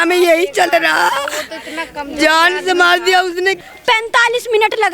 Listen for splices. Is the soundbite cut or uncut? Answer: cut